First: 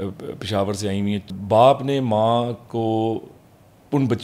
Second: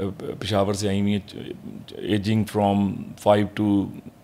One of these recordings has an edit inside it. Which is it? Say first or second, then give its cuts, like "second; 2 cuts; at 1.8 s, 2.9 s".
first; 1 cut; at 1.3 s